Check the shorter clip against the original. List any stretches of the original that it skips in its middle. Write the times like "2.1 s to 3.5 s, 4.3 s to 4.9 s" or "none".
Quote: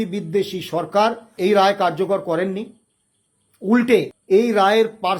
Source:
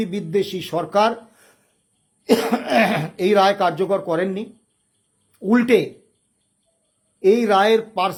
1.3 s to 3.1 s, 6.0 s to 7.1 s